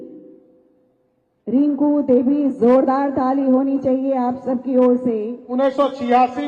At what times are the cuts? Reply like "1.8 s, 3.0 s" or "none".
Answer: 5.4 s